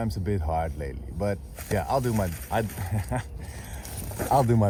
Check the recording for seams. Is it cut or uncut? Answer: uncut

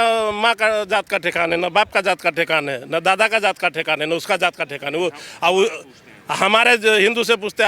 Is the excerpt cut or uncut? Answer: uncut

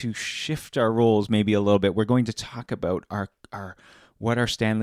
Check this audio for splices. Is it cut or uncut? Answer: uncut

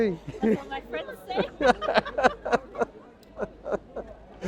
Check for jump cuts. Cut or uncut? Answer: uncut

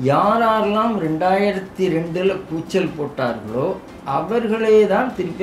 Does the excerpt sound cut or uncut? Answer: uncut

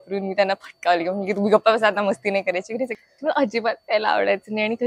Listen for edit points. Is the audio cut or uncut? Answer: cut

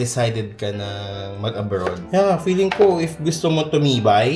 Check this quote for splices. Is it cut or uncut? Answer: cut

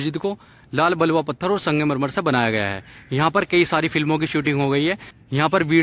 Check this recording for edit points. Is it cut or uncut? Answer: uncut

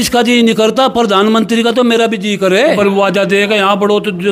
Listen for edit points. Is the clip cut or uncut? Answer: cut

